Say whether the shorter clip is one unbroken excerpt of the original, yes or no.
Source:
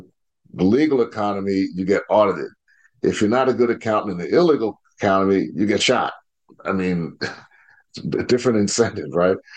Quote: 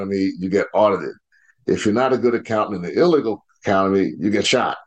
yes